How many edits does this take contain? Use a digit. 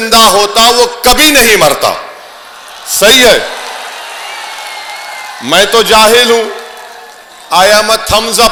0